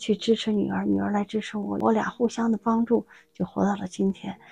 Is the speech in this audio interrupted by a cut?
yes; 1 cut; at 1.8 s

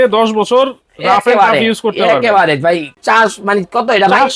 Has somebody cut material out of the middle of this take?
yes; 1 cut; at 2.9 s

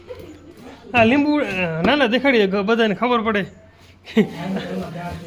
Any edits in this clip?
no; 0 cuts

